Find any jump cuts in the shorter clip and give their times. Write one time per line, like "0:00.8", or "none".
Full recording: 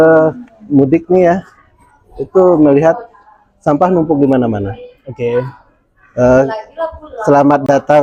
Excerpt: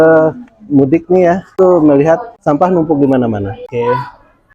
0:01.5
0:02.3
0:03.6